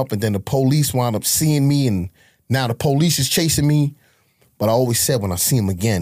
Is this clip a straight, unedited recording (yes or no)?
yes